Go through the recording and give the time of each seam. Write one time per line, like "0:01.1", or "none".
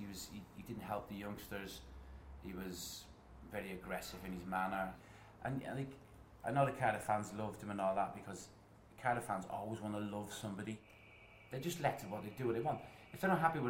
0:05.0
0:10.9